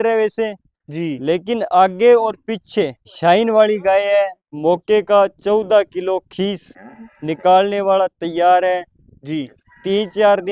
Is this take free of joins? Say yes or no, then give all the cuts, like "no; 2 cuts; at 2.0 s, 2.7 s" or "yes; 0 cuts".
no; 2 cuts; at 3.0 s, 4.5 s